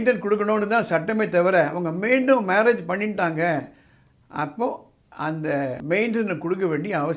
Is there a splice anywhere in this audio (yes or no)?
yes